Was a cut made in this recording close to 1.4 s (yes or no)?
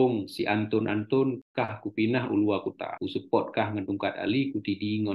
yes